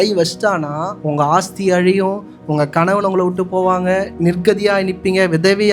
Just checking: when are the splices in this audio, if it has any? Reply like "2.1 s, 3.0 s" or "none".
0.9 s, 4.1 s